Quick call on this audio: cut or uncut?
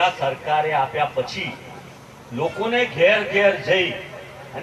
uncut